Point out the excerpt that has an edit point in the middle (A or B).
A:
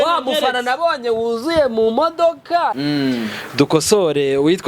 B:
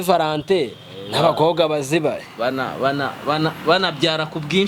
A